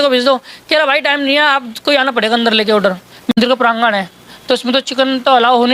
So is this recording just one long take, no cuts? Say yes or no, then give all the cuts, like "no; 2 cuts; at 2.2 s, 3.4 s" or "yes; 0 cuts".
no; 1 cut; at 3.3 s